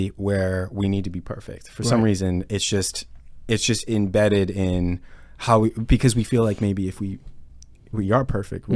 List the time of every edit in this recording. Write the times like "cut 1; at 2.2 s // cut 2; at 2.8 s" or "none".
none